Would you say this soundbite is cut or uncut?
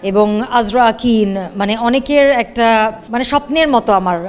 cut